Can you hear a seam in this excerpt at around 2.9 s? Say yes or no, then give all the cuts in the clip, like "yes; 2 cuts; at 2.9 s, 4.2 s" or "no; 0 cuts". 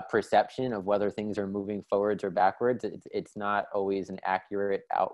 no; 0 cuts